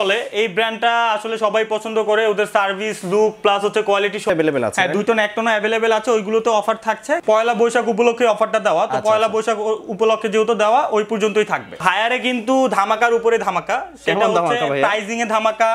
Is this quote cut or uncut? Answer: cut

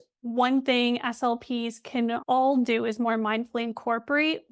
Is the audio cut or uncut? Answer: cut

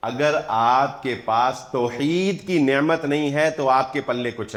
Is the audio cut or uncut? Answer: uncut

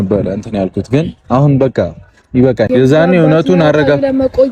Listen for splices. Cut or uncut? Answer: cut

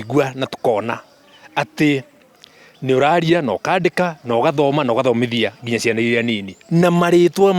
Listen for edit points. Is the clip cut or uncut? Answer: uncut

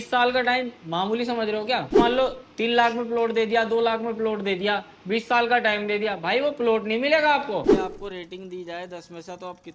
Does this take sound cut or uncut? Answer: cut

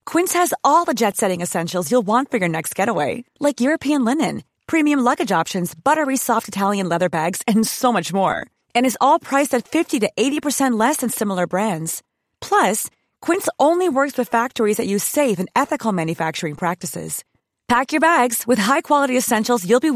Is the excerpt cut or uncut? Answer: uncut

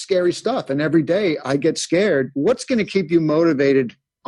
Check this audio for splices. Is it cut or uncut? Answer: cut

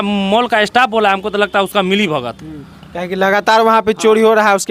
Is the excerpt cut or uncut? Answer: uncut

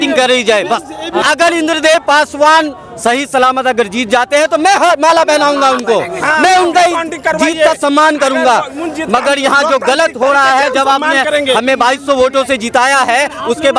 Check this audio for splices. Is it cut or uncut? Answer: cut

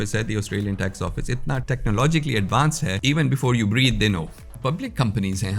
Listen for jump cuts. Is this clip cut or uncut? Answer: cut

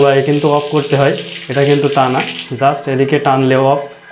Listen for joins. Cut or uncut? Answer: uncut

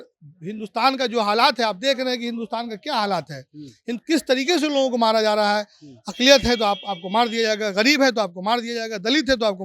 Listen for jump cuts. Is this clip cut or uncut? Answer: uncut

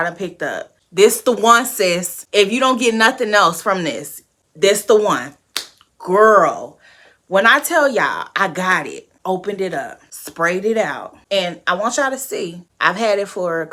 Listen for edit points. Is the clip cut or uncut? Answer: uncut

